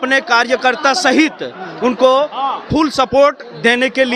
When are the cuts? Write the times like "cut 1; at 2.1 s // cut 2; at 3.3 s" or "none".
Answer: none